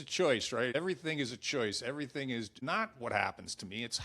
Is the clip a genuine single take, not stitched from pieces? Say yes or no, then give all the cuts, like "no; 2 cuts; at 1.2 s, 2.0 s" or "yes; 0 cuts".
no; 2 cuts; at 0.7 s, 2.6 s